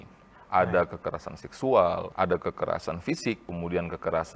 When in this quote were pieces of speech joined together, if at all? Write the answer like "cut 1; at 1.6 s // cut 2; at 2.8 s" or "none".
cut 1; at 2.1 s // cut 2; at 3.4 s